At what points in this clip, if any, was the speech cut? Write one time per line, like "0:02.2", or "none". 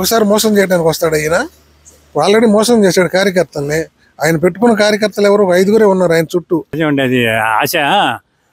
0:06.7